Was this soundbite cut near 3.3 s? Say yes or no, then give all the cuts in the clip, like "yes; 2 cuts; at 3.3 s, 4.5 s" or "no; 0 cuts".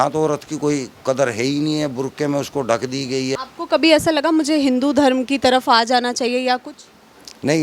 yes; 1 cut; at 3.3 s